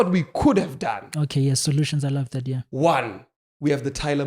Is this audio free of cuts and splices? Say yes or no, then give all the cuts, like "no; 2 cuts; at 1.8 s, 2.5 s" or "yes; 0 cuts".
no; 1 cut; at 2.6 s